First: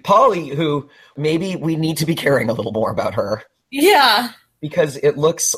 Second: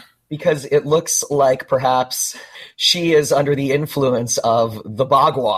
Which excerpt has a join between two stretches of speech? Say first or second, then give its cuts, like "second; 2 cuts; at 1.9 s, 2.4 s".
first; 1 cut; at 1.1 s